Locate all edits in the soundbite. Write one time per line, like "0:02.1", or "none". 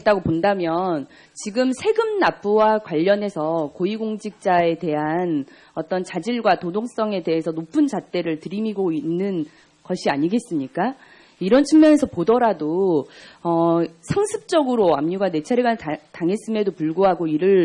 0:03.9

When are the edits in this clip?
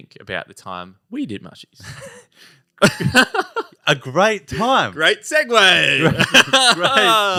none

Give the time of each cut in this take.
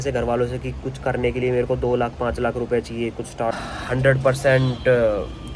0:03.5

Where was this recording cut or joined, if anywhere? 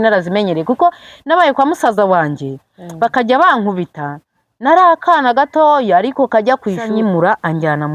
0:06.9

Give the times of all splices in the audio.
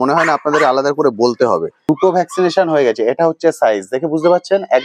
0:01.7

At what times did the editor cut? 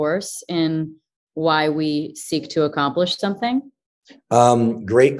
none

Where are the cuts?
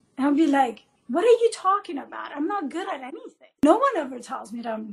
0:03.6

